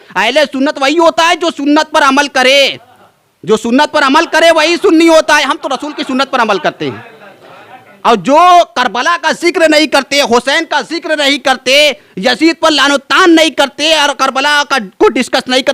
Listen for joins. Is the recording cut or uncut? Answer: uncut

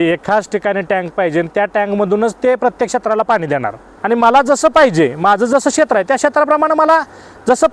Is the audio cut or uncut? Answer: cut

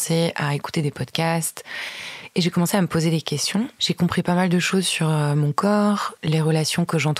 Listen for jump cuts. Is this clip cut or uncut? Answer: cut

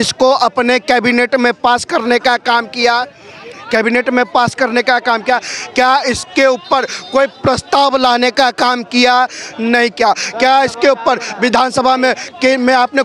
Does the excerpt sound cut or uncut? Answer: uncut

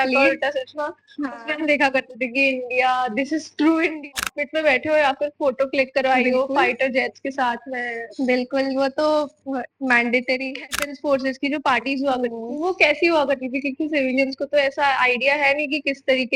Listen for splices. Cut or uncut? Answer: cut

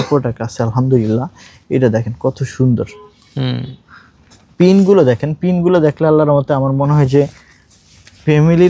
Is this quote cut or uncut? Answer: uncut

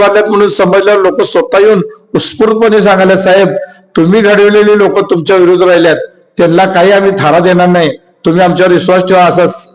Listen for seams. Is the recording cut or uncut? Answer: uncut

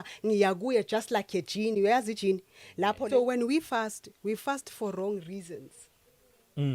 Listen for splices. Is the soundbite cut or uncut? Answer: cut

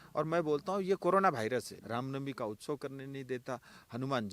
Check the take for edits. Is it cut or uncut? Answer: cut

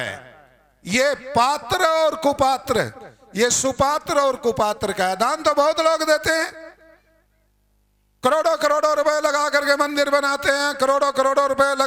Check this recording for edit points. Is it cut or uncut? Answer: uncut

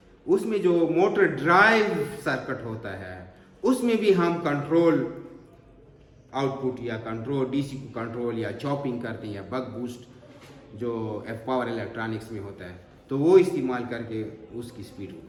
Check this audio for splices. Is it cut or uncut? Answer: uncut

